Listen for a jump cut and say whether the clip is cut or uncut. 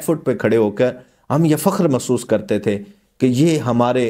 uncut